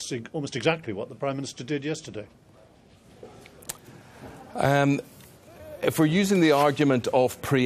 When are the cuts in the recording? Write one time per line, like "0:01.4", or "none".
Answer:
0:02.9